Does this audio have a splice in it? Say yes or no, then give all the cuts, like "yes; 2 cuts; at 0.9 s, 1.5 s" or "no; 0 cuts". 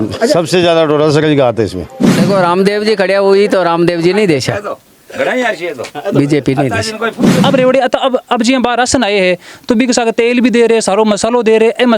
yes; 2 cuts; at 2.1 s, 7.2 s